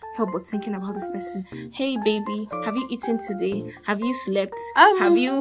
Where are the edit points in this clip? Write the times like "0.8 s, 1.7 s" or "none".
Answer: none